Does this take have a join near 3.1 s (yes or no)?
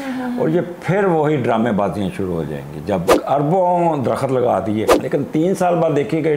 yes